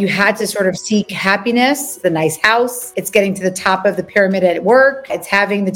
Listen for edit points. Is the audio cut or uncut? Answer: cut